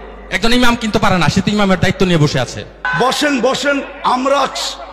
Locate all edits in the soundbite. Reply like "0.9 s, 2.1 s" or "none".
2.8 s